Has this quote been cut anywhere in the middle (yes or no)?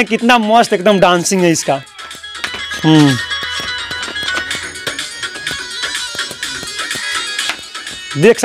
no